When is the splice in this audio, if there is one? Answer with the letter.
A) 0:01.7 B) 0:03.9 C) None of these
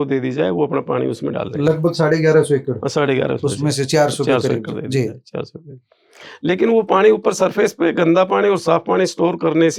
C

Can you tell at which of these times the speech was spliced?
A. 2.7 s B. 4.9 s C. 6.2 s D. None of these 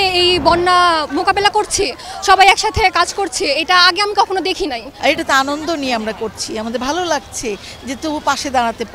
B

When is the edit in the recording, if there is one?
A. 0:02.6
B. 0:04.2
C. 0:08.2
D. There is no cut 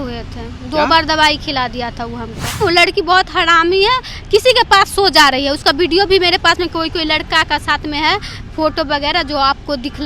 A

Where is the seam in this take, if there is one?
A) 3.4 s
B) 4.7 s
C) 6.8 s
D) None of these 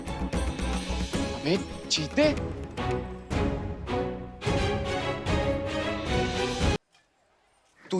C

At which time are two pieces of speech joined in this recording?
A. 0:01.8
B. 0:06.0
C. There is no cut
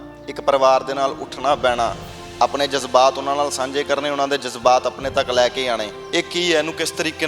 B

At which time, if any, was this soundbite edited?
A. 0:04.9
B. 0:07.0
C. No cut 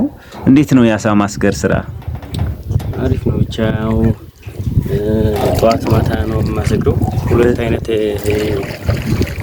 B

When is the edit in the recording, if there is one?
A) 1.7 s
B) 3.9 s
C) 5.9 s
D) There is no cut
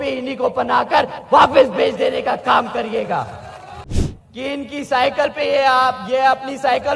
B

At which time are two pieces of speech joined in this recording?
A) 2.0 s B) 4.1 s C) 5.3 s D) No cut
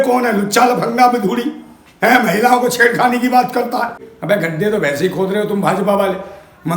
B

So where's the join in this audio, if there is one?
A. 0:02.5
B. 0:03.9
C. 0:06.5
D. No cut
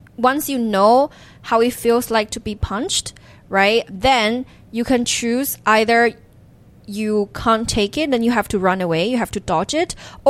B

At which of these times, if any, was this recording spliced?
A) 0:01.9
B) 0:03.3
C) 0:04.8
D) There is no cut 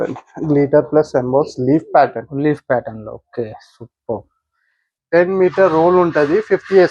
C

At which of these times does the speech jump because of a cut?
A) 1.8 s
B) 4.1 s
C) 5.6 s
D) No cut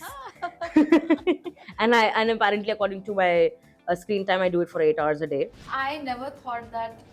C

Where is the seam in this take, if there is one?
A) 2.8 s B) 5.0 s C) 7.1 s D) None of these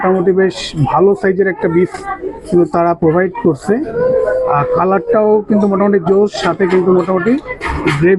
D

